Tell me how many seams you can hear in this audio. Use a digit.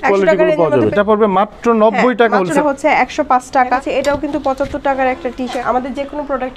4